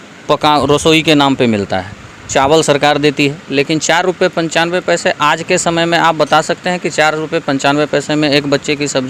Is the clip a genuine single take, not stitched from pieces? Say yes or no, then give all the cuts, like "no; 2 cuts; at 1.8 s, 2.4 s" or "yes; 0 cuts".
yes; 0 cuts